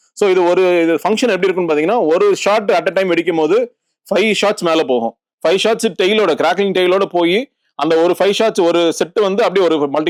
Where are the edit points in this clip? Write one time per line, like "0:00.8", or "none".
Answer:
none